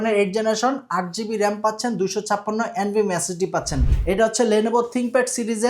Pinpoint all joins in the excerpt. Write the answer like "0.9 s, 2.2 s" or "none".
3.9 s